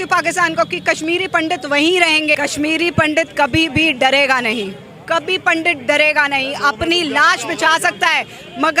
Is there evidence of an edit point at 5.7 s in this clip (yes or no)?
no